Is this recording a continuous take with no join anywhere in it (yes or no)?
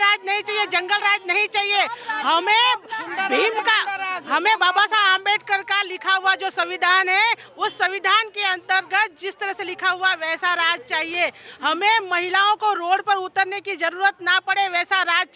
yes